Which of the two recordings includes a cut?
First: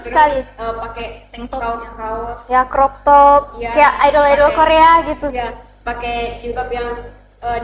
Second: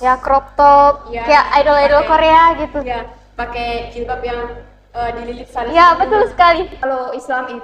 second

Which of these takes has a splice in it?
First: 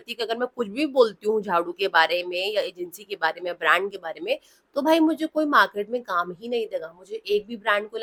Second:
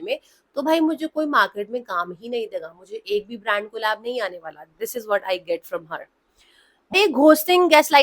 second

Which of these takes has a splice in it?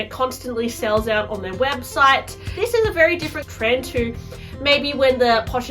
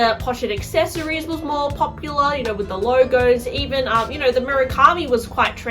first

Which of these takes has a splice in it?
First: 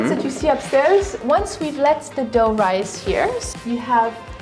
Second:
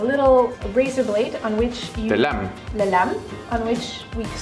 first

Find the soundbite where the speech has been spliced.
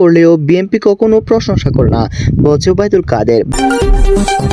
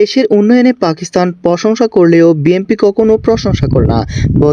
first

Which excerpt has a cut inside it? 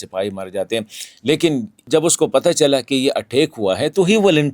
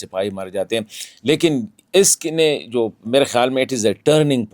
first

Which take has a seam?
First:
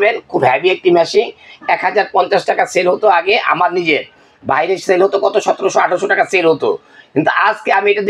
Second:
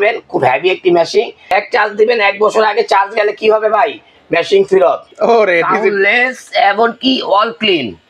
second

